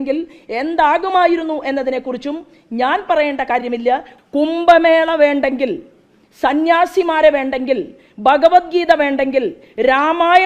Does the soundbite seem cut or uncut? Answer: cut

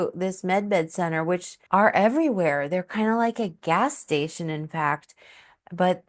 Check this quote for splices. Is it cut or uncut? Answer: cut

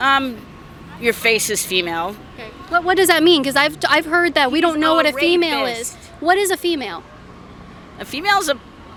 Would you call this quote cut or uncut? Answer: uncut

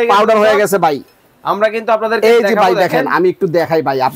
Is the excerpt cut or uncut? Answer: uncut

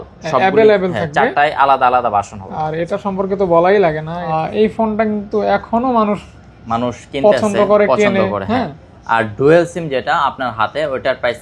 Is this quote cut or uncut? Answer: cut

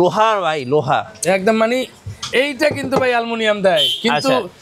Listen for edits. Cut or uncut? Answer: uncut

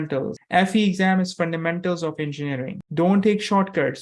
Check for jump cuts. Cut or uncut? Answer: cut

